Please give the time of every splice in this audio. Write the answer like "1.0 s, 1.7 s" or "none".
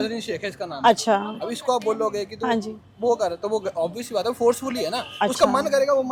none